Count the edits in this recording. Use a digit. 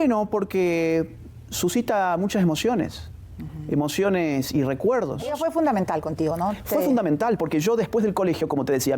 1